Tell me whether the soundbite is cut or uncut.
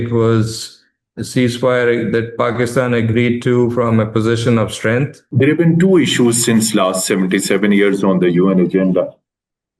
cut